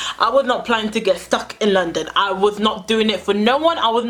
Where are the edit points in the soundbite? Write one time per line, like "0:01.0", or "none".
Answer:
none